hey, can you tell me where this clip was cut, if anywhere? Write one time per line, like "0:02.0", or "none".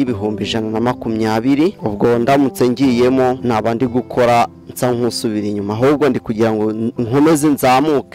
0:01.8
0:03.4